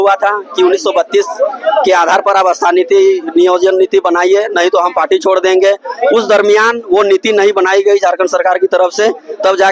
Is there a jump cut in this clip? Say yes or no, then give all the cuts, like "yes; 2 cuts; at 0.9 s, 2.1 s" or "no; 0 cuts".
no; 0 cuts